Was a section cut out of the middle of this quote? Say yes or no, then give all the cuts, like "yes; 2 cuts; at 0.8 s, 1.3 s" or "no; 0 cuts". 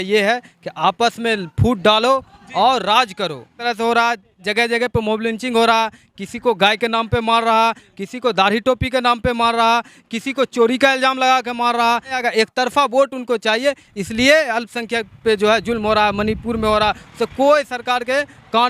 yes; 2 cuts; at 3.6 s, 12.2 s